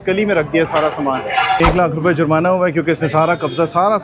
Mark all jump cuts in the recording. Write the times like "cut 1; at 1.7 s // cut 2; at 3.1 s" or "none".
cut 1; at 1.6 s